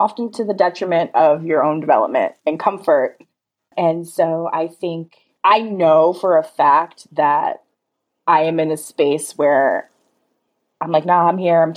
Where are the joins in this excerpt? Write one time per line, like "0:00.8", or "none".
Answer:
0:03.4